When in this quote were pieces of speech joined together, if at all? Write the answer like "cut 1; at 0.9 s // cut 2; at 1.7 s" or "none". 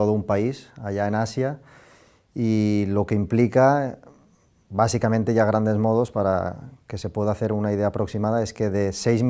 cut 1; at 2.7 s